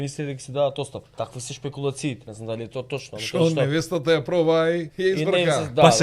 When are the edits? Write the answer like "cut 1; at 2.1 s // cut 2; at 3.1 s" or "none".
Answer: cut 1; at 1.0 s // cut 2; at 2.3 s // cut 3; at 4.9 s